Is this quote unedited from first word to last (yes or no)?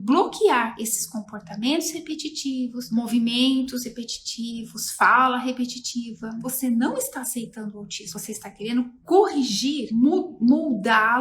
no